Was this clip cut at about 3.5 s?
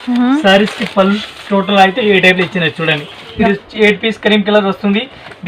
yes; 1 cut; at 3.5 s

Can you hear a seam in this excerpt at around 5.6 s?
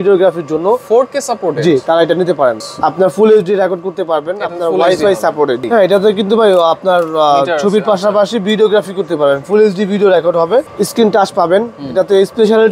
yes; 3 cuts; at 2.6 s, 5.6 s, 10.7 s

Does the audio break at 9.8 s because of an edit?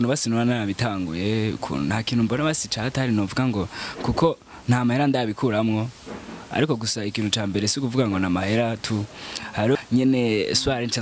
yes; 1 cut; at 9.8 s

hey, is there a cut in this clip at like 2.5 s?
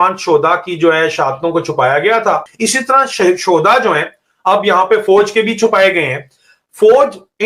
yes; 1 cut; at 2.5 s

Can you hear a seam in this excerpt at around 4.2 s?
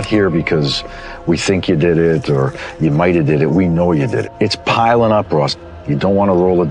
yes; 1 cut; at 4.2 s

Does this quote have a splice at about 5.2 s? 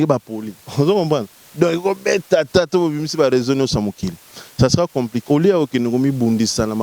yes; 1 cut; at 5.2 s

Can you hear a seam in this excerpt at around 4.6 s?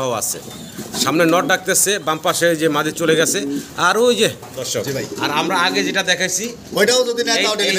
yes; 1 cut; at 4.6 s

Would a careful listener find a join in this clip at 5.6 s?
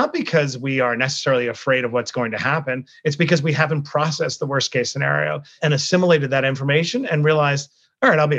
yes; 1 cut; at 5.6 s

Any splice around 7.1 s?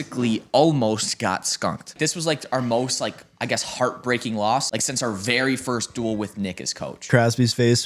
yes; 3 cuts; at 1.9 s, 4.7 s, 7.1 s

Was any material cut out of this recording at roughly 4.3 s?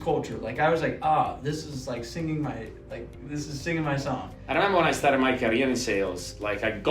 yes; 1 cut; at 4.3 s

